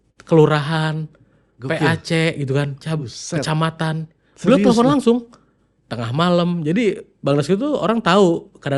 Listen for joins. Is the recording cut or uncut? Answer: uncut